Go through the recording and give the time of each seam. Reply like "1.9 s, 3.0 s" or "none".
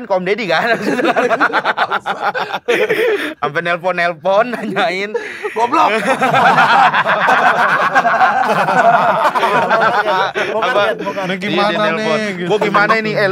none